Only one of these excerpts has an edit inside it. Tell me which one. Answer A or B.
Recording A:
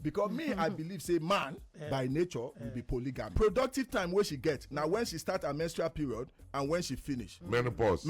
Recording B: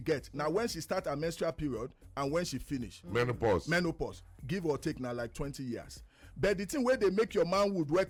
A